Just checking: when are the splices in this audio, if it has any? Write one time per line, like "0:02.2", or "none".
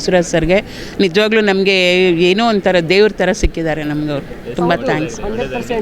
none